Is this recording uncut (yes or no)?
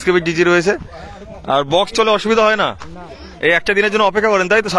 yes